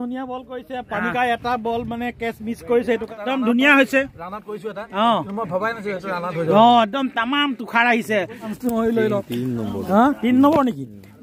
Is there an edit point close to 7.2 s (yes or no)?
no